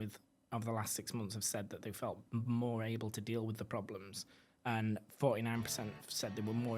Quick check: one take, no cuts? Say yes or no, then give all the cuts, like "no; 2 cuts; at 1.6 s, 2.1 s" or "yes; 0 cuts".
yes; 0 cuts